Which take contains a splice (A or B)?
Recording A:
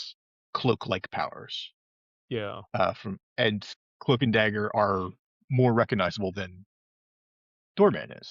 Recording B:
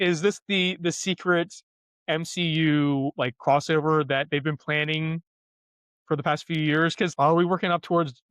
B